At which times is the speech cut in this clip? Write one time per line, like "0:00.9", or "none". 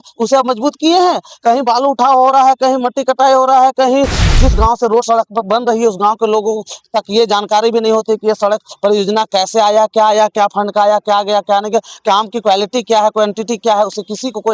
0:04.3